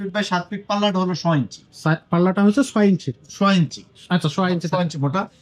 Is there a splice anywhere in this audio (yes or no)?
no